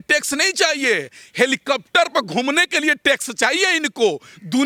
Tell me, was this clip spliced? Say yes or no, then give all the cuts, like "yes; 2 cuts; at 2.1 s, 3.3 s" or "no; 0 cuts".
no; 0 cuts